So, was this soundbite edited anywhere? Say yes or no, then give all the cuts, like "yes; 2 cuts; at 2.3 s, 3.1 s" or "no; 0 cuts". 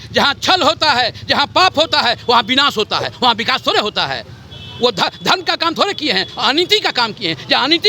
no; 0 cuts